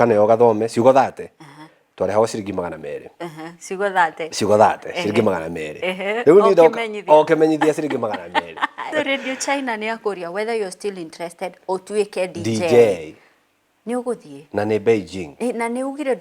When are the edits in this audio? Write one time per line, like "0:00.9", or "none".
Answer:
0:08.8